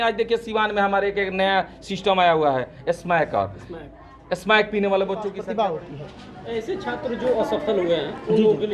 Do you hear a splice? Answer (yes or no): yes